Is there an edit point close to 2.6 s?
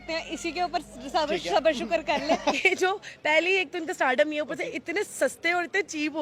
yes; 1 cut; at 2.6 s

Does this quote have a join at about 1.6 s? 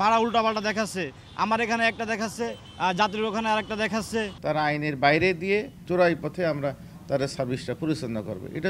no; 2 cuts; at 4.3 s, 5.8 s

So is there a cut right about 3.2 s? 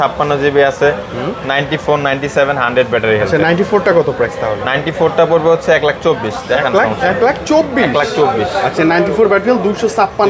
no; 0 cuts

